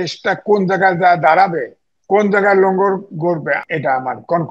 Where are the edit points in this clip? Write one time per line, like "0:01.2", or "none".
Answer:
0:03.6